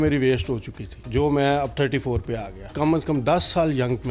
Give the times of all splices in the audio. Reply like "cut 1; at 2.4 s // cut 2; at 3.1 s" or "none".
cut 1; at 2.7 s